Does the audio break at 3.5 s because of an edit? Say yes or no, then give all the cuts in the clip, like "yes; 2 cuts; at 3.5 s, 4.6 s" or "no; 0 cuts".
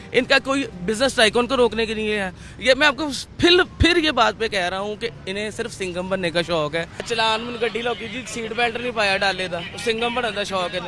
no; 1 cut; at 7.1 s